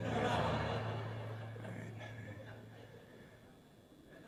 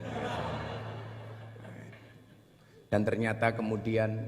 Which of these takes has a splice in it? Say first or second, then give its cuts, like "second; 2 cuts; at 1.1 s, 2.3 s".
second; 1 cut; at 2.0 s